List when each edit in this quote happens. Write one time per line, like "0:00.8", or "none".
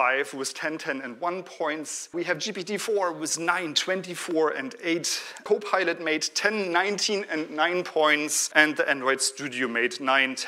0:02.1
0:05.4
0:08.4